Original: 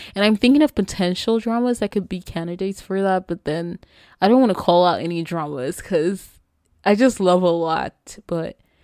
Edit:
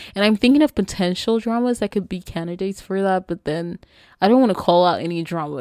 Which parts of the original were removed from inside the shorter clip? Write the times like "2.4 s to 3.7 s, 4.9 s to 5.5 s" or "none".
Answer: none